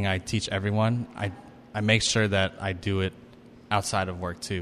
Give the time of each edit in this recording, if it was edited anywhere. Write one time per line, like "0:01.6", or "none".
none

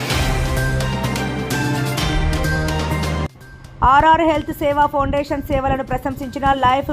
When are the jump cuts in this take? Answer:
0:03.3

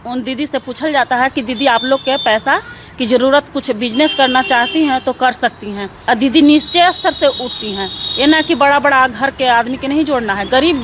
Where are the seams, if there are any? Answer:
0:05.9

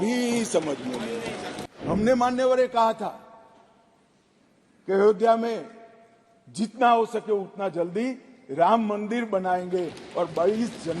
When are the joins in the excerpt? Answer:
0:01.9

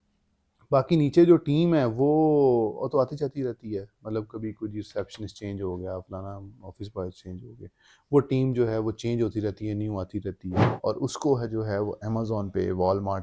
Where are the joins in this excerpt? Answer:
0:10.7

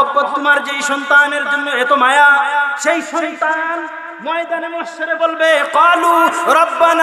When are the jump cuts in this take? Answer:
0:02.7

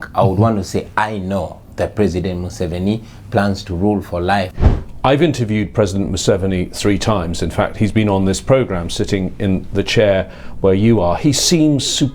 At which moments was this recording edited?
0:04.6

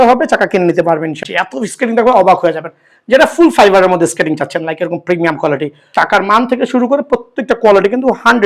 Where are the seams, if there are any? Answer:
0:01.2
0:05.8

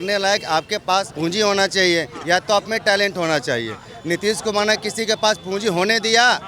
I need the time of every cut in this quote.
0:01.1

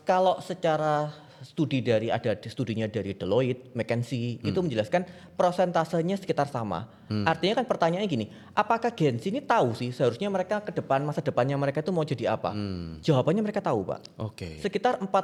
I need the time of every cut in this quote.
none

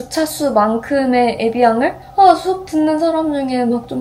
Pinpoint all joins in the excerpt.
0:02.0

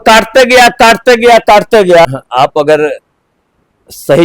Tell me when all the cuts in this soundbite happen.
0:02.1

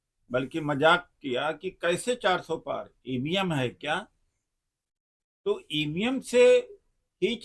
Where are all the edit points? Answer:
none

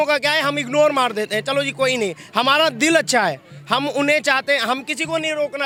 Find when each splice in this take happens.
none

